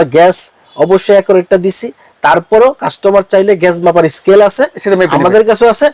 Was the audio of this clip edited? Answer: no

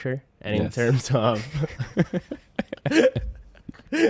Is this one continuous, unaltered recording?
yes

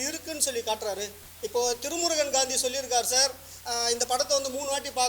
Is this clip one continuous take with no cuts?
no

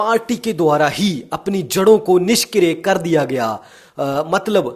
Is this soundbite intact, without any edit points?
yes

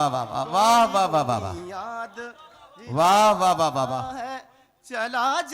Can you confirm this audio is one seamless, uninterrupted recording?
yes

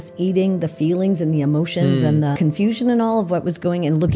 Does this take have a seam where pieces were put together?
yes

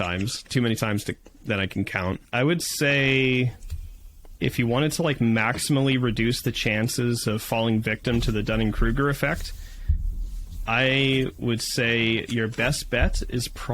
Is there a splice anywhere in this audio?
yes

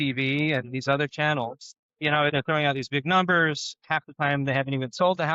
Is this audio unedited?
no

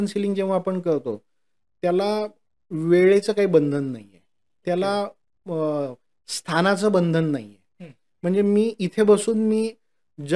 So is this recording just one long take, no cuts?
yes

